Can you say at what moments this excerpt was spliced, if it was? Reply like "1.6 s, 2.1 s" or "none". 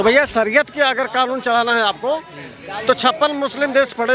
none